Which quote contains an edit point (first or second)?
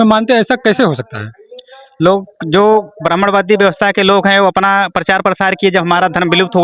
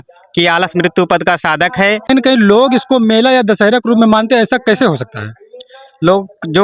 second